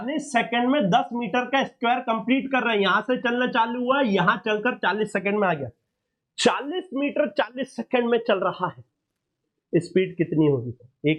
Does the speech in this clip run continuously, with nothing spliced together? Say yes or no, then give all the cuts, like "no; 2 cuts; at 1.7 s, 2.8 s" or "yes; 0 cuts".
yes; 0 cuts